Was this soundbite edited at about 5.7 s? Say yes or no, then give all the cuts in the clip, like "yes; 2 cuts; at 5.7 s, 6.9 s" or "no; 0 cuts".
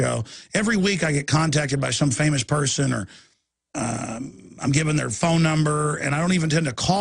yes; 1 cut; at 5.7 s